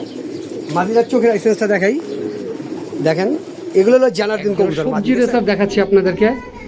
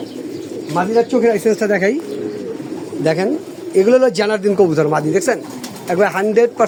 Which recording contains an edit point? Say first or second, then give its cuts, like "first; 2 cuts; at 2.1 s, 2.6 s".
first; 1 cut; at 4.8 s